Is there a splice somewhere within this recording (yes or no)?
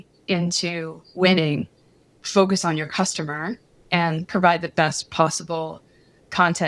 no